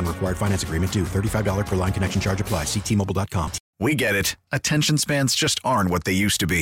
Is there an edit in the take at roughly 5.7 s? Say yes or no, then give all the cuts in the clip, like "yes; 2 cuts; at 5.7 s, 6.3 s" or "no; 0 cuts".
no; 1 cut; at 3.6 s